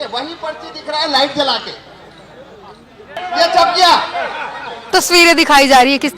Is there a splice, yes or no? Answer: yes